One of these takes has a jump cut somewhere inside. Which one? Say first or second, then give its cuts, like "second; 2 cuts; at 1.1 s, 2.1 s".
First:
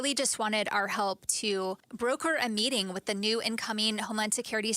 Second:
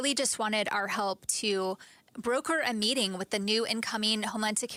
first; 1 cut; at 1.9 s